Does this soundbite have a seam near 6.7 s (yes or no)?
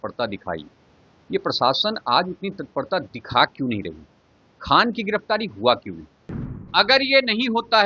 yes